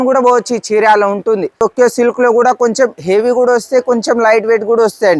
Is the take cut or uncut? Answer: cut